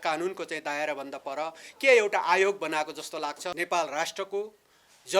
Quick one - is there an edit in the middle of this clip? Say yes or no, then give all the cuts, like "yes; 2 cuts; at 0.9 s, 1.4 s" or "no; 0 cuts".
yes; 1 cut; at 3.5 s